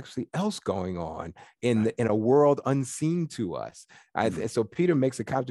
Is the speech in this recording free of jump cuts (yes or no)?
yes